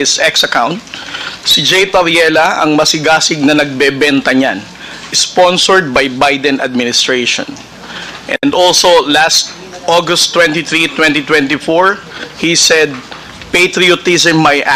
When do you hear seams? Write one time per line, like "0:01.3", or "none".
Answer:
none